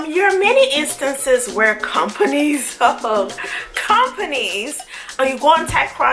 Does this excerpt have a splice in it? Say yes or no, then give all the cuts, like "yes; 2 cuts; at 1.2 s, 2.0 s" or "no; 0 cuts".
yes; 1 cut; at 5.2 s